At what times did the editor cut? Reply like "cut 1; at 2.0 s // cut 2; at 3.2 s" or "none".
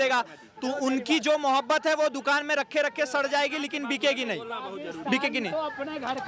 none